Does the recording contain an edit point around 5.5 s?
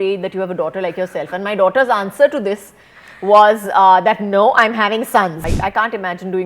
yes; 1 cut; at 5.5 s

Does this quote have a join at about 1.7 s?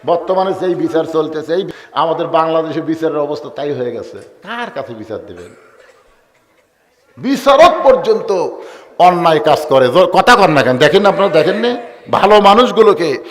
yes; 1 cut; at 1.7 s

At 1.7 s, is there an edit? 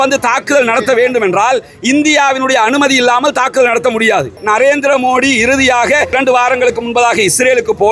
no; 2 cuts; at 4.4 s, 6.2 s

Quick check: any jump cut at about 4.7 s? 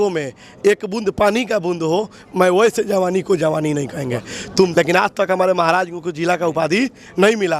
yes; 1 cut; at 4.7 s

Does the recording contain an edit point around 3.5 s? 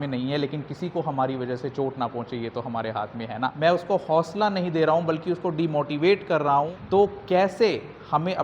yes; 2 cuts; at 3.5 s, 6.2 s

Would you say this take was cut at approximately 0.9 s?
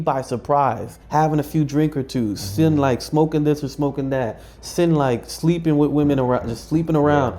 yes; 1 cut; at 0.9 s

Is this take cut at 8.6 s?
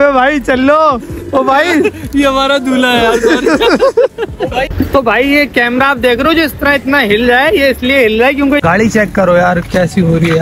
yes; 2 cuts; at 4.8 s, 8.6 s

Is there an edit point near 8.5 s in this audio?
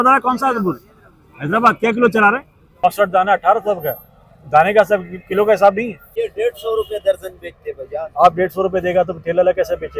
no; 2 cuts; at 2.8 s, 6.1 s

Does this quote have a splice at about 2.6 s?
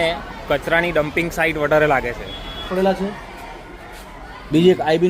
yes; 1 cut; at 2.6 s

